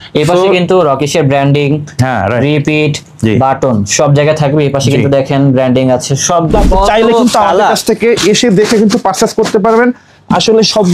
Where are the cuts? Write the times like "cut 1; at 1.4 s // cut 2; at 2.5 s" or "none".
cut 1; at 6.5 s